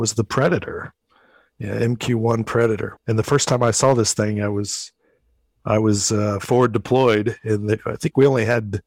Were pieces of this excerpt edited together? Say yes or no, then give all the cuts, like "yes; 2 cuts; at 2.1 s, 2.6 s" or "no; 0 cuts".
yes; 1 cut; at 2.9 s